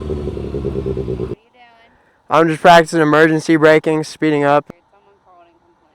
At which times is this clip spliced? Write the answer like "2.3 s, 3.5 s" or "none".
1.4 s, 4.7 s

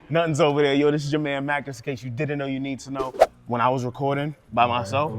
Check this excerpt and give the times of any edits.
3.2 s

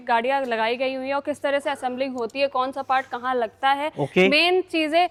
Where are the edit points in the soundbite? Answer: none

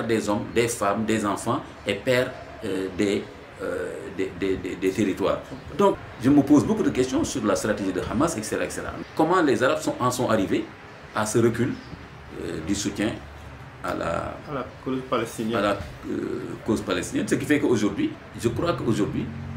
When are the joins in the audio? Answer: 6.1 s, 8.9 s, 18.3 s

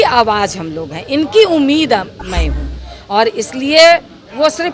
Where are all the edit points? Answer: none

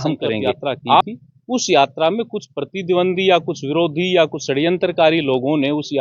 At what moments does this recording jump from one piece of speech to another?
1.0 s

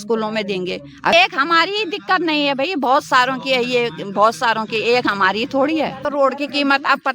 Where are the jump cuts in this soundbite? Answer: 1.1 s, 6.0 s

